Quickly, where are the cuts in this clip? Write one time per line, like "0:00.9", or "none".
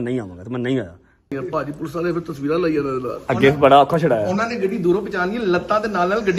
0:01.3